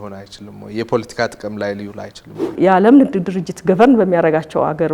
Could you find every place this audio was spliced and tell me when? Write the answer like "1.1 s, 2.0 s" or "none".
2.5 s